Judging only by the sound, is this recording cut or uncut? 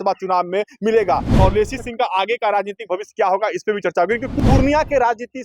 cut